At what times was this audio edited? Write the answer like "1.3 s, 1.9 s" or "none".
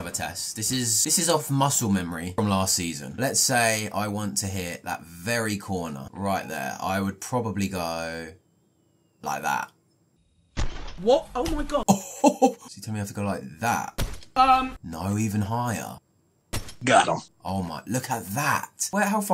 1.0 s

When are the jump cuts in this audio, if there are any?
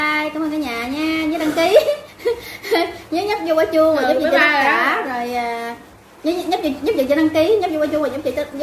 none

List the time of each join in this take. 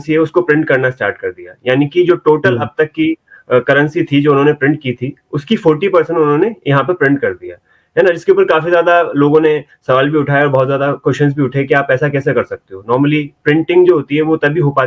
none

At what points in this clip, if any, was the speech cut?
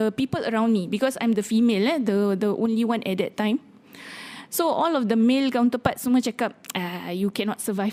none

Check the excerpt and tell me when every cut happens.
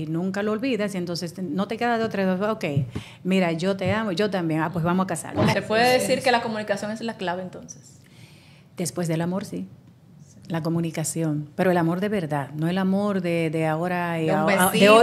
5.5 s

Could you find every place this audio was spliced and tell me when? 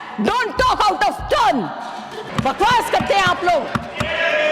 2.3 s

